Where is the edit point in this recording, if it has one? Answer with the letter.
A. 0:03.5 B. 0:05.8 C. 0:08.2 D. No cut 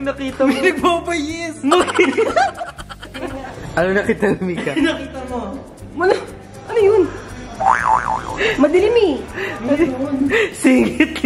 A